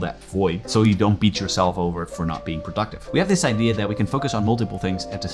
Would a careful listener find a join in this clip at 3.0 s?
yes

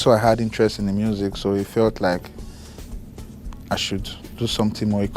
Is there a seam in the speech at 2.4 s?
no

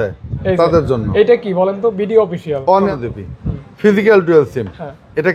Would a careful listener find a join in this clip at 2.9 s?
yes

